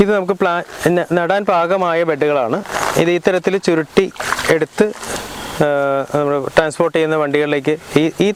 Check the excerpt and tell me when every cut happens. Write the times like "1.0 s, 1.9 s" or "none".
none